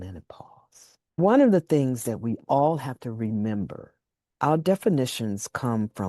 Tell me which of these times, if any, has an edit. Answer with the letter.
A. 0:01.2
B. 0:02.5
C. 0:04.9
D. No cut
A